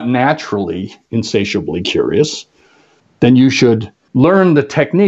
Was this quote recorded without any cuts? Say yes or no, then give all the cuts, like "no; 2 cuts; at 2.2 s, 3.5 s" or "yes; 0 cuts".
no; 1 cut; at 4.0 s